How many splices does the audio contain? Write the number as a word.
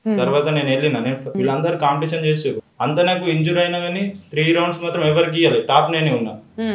two